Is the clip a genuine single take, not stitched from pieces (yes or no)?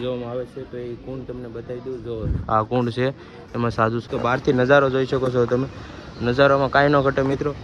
no